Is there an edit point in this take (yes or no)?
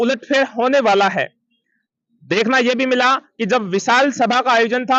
no